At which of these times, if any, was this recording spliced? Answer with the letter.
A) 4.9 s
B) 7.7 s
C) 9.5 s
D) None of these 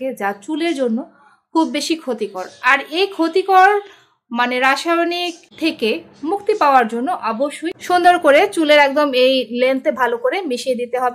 B